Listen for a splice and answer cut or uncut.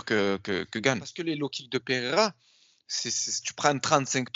cut